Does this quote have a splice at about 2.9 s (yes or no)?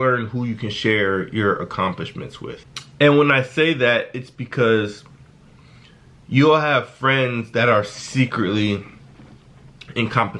no